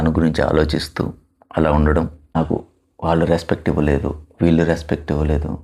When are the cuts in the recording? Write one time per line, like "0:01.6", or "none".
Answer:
0:02.4

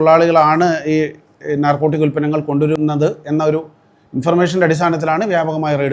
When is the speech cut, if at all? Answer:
0:02.8

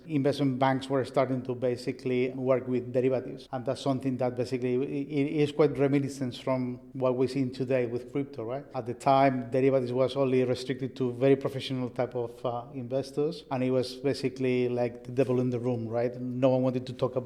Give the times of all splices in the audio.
none

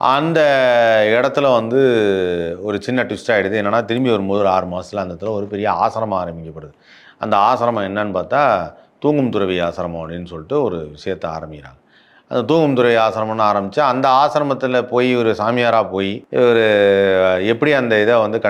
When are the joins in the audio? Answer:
0:16.2

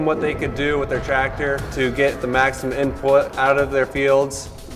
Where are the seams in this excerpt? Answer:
none

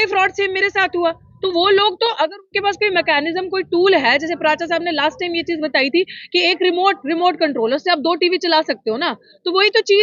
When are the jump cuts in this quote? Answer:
none

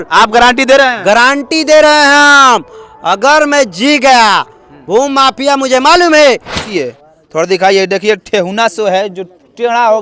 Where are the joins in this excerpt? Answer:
0:06.7

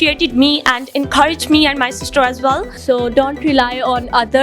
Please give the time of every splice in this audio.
0:02.7

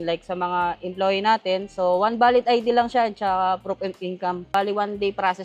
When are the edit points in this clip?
0:04.5

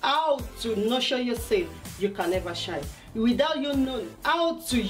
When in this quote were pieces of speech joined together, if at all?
0:02.3

